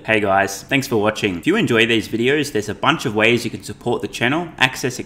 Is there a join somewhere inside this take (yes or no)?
yes